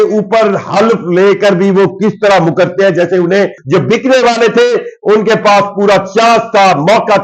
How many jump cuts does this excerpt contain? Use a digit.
1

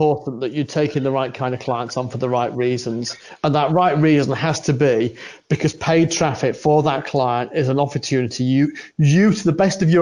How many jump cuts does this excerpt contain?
0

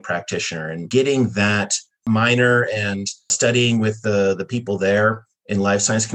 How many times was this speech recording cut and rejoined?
3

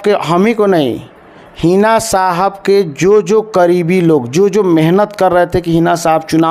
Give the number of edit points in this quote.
0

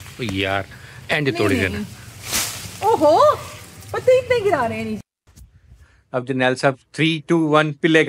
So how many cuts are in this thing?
1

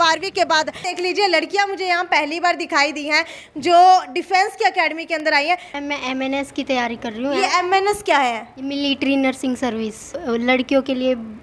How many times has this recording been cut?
3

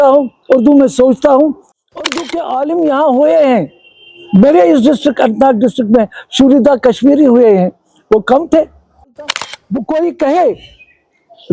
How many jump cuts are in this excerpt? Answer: 2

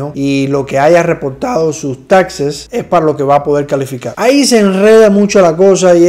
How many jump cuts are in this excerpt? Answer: 0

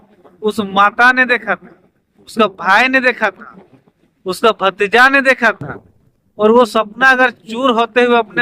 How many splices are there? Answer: 0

